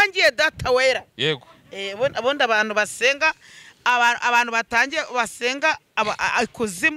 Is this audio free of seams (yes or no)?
yes